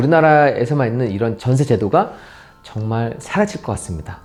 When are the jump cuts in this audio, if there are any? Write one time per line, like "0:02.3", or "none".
none